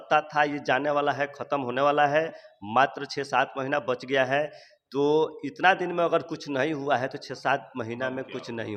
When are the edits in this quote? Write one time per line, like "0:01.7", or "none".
none